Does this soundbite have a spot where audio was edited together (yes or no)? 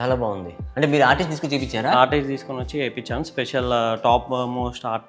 no